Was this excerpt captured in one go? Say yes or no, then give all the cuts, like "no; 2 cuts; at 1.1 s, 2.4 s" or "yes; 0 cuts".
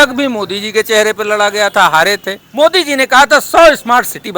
no; 1 cut; at 2.4 s